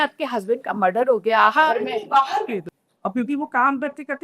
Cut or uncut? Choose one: cut